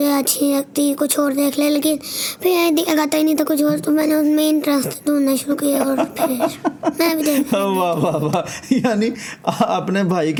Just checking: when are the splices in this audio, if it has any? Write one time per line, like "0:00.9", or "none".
none